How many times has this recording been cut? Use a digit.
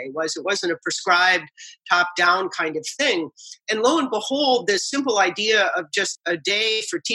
1